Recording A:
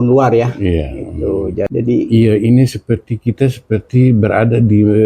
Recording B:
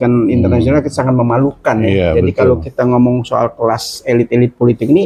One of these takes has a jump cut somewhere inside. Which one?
A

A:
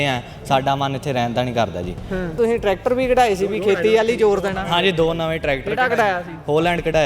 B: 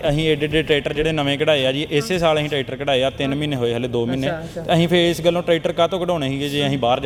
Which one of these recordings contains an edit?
A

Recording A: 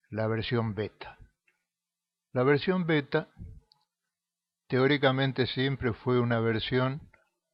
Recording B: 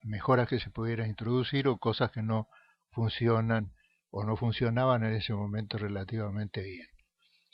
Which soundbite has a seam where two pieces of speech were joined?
B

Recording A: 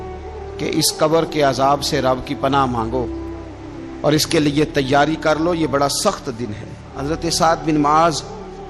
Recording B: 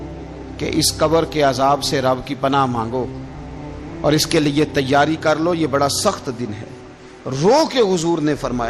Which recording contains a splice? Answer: A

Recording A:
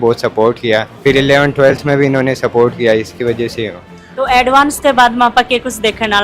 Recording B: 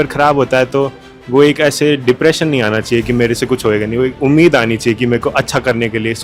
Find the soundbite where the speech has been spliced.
A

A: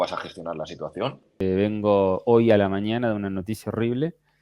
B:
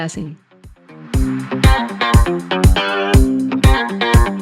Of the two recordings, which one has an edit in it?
A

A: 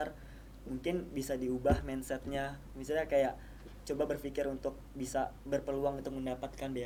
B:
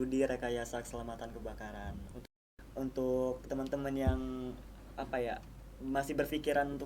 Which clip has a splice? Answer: B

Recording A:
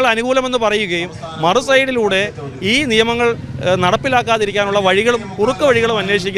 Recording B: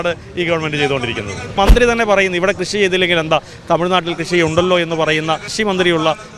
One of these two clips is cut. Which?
B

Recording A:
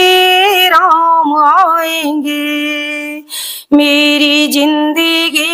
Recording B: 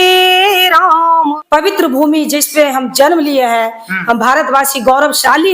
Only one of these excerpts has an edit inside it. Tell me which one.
B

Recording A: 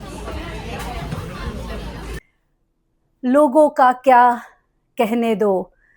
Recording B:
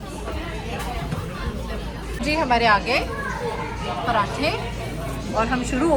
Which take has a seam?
A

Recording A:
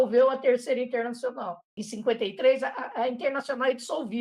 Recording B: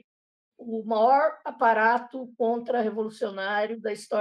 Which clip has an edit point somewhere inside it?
A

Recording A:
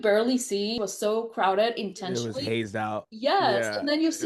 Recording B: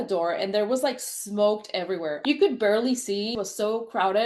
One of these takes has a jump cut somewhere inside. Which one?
A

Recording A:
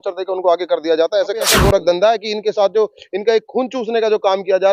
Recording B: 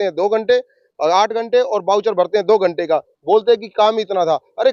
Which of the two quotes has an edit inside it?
A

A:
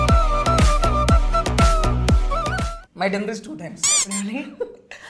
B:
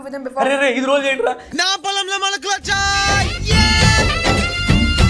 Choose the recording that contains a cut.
A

